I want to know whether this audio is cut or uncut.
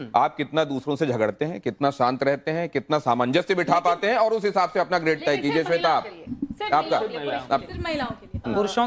uncut